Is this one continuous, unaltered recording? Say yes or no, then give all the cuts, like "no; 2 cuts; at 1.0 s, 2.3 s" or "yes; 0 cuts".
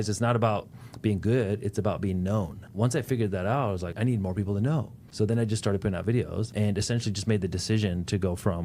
no; 4 cuts; at 2.7 s, 3.9 s, 5.0 s, 6.5 s